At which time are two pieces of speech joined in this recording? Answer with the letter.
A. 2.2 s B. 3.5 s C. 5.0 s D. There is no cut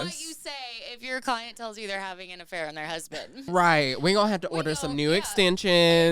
B